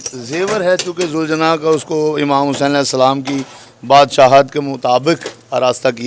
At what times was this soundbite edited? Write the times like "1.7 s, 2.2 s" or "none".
none